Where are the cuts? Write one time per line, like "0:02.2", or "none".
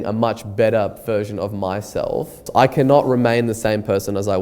0:02.4

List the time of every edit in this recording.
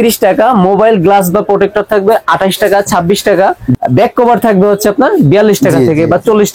0:03.8

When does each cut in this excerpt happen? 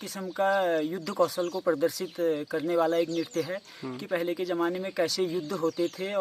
none

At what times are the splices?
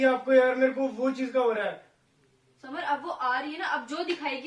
none

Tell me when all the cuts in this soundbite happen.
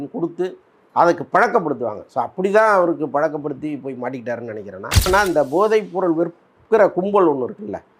0:05.1

